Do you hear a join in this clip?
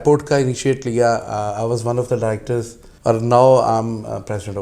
yes; 1 cut; at 2.8 s

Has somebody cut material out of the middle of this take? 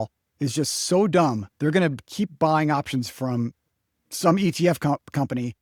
no; 0 cuts

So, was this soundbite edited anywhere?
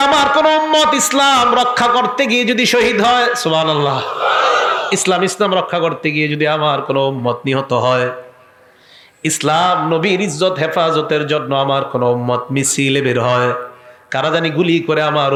no; 0 cuts

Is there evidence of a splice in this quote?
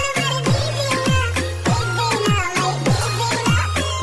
no; 0 cuts

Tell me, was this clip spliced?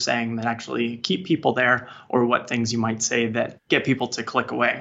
yes; 1 cut; at 3.6 s

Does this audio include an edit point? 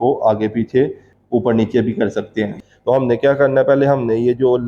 yes; 2 cuts; at 1.1 s, 2.5 s

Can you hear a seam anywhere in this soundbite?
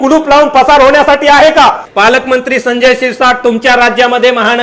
yes; 1 cut; at 1.9 s

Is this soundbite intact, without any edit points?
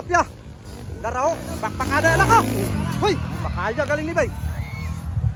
yes; 0 cuts

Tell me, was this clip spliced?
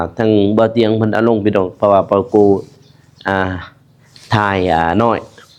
no; 0 cuts

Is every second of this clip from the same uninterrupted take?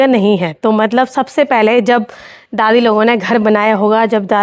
yes; 0 cuts

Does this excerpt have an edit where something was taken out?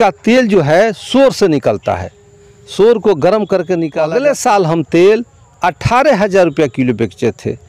yes; 1 cut; at 3.9 s

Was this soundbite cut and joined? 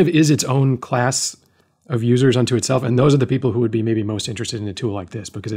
no; 0 cuts

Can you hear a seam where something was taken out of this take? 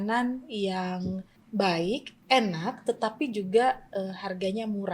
yes; 1 cut; at 1.5 s

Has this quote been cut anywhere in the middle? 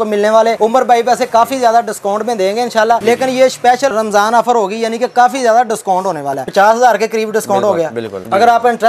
yes; 2 cuts; at 3.0 s, 6.4 s

